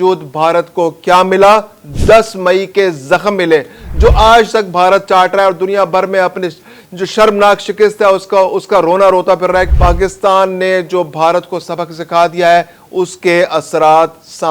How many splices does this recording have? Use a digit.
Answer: 1